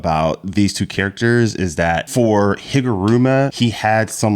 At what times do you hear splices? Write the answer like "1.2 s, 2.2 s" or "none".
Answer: 2.1 s, 3.5 s